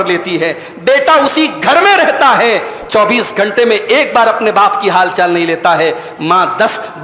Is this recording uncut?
yes; 0 cuts

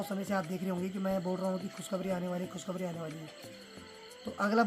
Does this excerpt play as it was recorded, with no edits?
yes; 0 cuts

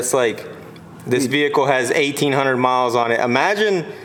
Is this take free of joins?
yes; 0 cuts

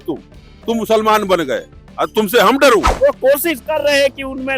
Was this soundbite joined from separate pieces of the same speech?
yes; 1 cut; at 2.9 s

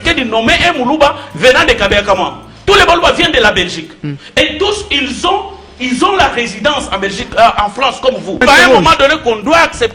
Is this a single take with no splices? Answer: no; 1 cut; at 8.4 s

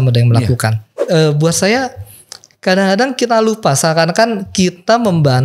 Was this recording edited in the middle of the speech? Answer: yes; 1 cut; at 0.9 s

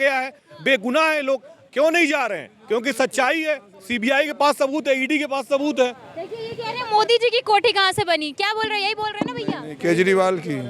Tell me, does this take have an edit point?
no; 0 cuts

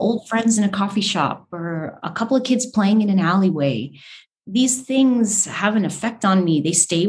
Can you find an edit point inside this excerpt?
no; 0 cuts

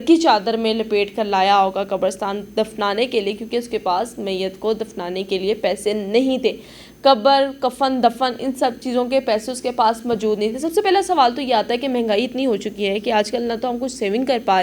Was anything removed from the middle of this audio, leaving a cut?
no; 0 cuts

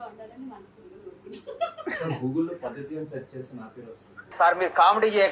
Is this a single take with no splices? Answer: yes; 0 cuts

